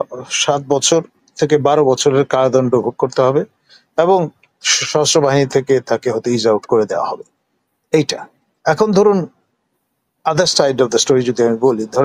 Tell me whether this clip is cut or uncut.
uncut